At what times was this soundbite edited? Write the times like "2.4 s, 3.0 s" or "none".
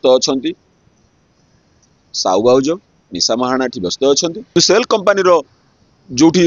4.5 s